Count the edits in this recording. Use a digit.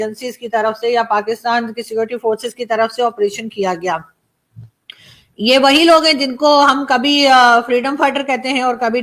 0